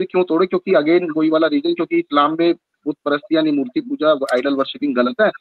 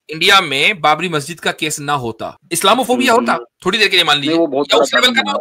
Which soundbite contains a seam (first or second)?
second